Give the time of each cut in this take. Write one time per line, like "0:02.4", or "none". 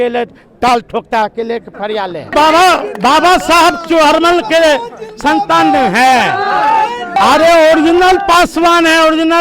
0:02.3
0:07.2